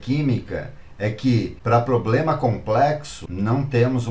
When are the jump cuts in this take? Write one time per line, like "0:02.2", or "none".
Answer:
0:01.6
0:03.2